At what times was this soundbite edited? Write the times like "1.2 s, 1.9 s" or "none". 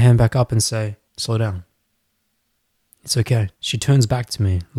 1.1 s, 3.6 s